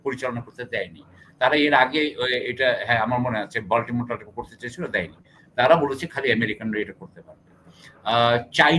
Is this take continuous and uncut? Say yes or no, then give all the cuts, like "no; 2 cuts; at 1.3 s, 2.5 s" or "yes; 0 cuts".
yes; 0 cuts